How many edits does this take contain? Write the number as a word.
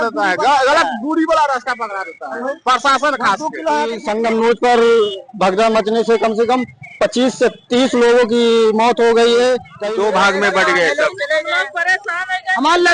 two